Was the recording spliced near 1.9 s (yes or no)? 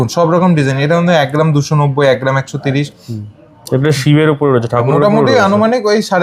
no